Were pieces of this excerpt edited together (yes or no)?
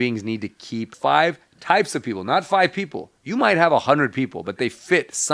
yes